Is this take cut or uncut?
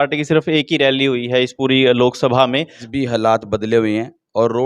cut